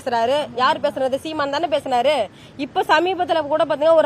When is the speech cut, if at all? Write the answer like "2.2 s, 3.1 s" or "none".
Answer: none